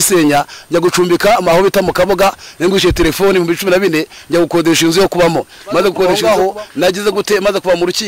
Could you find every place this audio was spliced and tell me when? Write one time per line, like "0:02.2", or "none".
0:06.1